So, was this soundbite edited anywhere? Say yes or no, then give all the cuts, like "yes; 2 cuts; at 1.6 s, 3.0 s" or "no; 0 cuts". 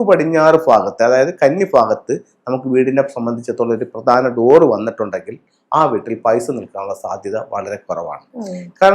no; 0 cuts